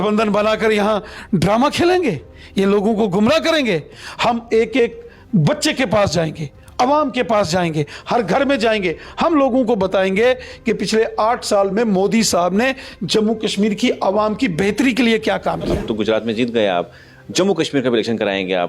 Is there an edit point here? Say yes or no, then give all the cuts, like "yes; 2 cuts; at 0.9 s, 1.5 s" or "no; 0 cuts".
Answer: yes; 1 cut; at 15.7 s